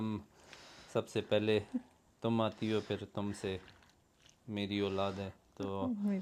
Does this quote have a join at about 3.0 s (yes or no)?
no